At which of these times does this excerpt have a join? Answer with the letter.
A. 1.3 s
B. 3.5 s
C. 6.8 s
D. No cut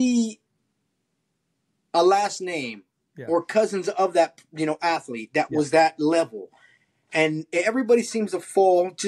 D